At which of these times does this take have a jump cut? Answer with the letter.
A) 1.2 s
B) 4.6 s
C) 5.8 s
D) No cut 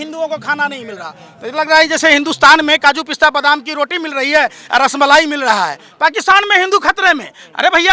D